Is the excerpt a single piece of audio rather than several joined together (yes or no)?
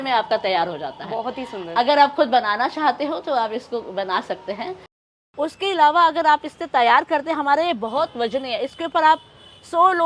no